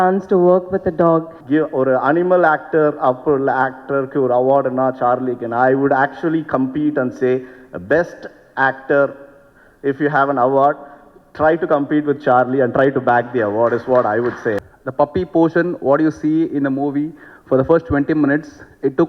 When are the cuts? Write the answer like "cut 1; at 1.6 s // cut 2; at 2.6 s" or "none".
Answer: cut 1; at 1.4 s // cut 2; at 14.6 s